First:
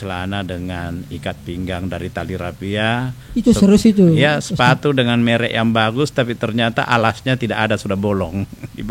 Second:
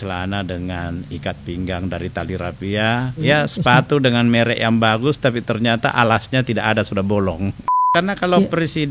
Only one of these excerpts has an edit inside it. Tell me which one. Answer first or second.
second